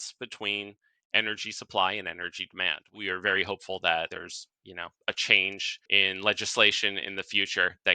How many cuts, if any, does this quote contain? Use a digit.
3